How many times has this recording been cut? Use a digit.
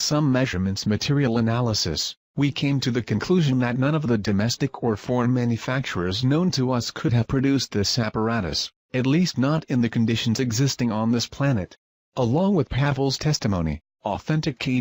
1